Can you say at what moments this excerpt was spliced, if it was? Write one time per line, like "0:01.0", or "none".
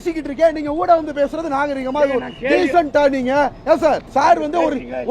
0:04.0